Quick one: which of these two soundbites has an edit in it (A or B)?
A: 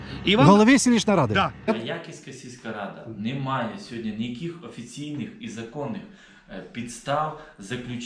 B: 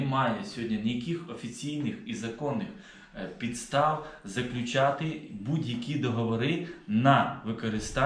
A